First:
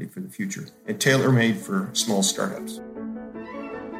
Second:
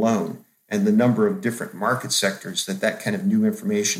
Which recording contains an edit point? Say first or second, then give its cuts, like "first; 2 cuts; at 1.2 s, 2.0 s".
first; 1 cut; at 2.7 s